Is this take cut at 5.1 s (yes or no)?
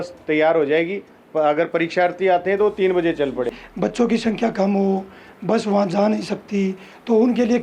no